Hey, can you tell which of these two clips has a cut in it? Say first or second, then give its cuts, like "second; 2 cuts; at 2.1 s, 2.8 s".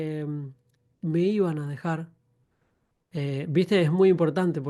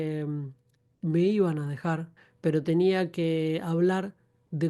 second; 1 cut; at 2.2 s